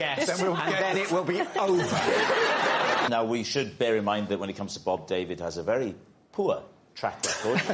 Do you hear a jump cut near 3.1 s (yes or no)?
yes